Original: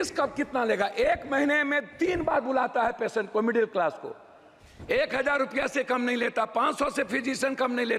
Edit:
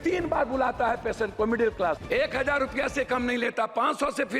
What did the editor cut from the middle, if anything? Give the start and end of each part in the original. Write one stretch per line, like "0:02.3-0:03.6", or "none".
0:04.0-0:04.8